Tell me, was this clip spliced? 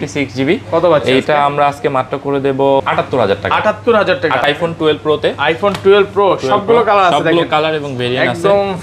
yes; 2 cuts; at 2.8 s, 4.4 s

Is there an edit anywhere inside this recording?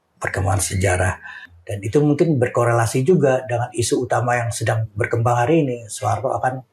yes; 1 cut; at 1.5 s

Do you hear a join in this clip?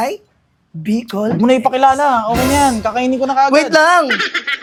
no; 0 cuts

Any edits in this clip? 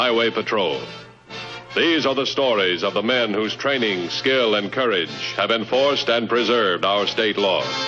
no; 0 cuts

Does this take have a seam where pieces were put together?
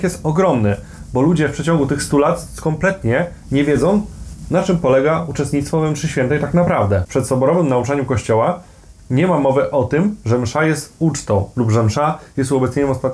yes; 1 cut; at 7.1 s

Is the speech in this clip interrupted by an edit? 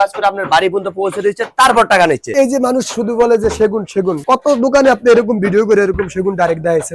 no; 0 cuts

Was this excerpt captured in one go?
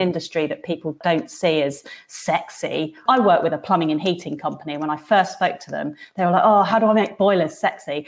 no; 2 cuts; at 1.0 s, 3.0 s

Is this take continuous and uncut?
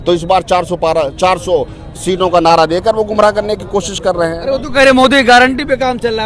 yes; 0 cuts

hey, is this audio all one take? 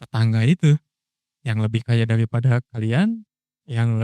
no; 1 cut; at 2.7 s

